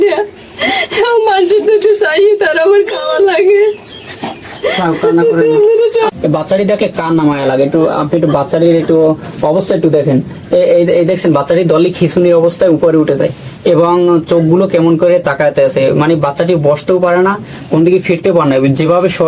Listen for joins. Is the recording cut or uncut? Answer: cut